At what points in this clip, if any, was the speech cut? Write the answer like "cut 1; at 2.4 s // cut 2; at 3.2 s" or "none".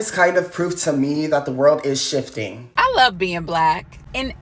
cut 1; at 2.6 s